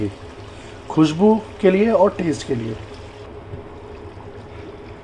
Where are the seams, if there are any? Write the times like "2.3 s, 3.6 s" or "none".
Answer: 3.2 s